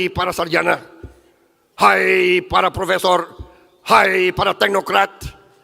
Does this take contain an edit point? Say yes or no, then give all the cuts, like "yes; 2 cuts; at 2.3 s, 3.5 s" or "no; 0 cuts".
no; 0 cuts